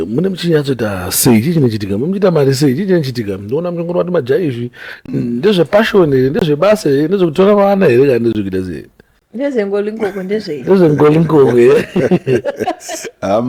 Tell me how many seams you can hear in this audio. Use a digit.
0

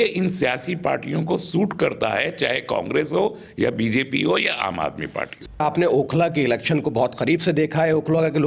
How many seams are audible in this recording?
0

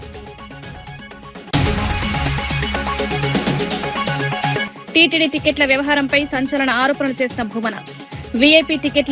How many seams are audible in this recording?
3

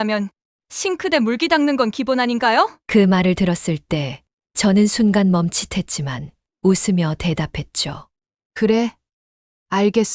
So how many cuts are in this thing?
0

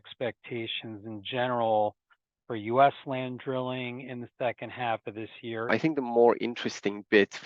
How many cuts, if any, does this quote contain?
1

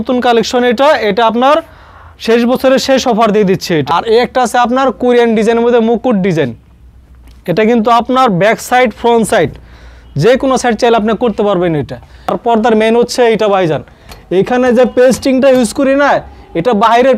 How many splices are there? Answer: 2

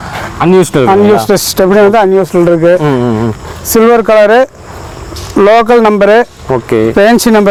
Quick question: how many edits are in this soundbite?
0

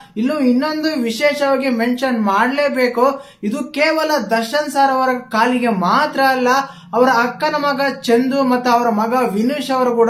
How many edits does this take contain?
0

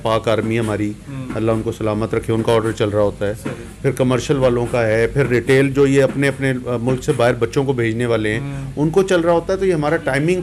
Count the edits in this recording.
0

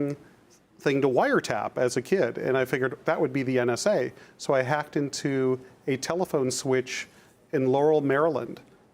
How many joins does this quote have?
1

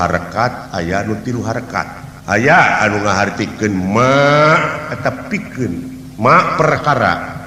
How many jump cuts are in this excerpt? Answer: 1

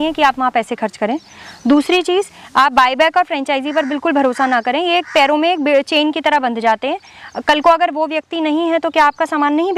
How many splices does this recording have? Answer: 0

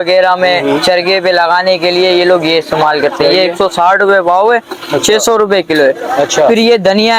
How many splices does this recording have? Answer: 0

